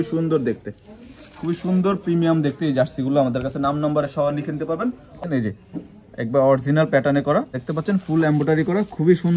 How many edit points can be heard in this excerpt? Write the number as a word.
two